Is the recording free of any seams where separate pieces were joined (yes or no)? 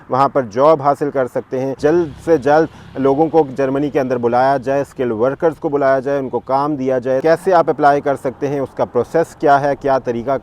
no